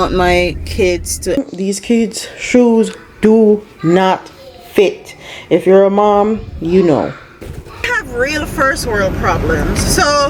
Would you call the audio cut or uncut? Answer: cut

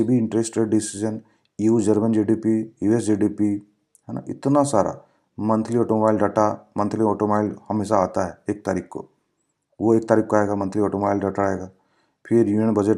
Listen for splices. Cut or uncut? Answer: uncut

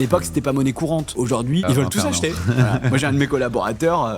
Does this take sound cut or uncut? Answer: cut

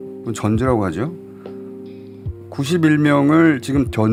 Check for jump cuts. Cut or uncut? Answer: uncut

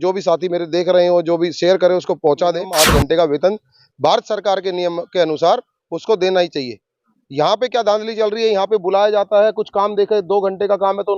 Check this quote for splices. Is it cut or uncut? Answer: cut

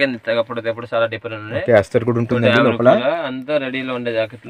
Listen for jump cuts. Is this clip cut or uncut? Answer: uncut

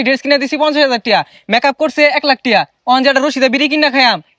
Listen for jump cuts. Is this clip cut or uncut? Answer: uncut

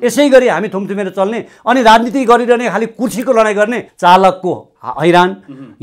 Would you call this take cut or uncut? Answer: cut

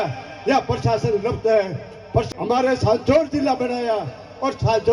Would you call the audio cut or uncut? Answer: cut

